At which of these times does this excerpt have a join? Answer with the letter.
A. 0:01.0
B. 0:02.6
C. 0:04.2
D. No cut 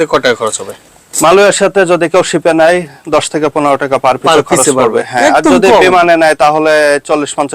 D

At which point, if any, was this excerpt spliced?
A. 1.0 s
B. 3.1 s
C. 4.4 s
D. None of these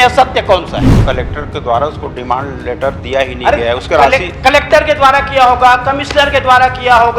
A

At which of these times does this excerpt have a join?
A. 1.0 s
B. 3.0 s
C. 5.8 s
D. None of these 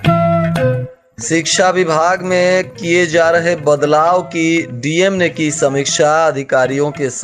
A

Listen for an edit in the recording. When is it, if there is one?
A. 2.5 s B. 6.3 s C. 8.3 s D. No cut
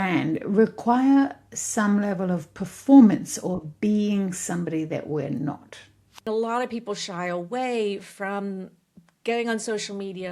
B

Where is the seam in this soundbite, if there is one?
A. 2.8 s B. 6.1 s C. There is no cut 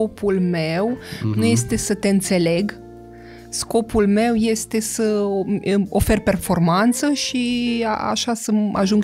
C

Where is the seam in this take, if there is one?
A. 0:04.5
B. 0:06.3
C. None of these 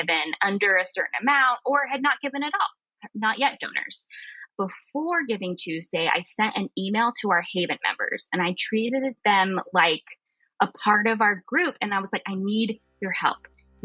A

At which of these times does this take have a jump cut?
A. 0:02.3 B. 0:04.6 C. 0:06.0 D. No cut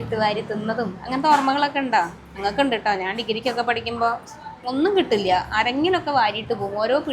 D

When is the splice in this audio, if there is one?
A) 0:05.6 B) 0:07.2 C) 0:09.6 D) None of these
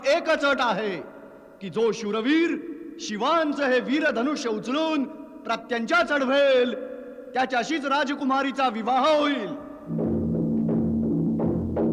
D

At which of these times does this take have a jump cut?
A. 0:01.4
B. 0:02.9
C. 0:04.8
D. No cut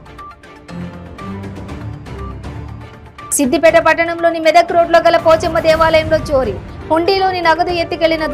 A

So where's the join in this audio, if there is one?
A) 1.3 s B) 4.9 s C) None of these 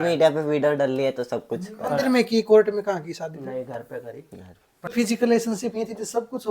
B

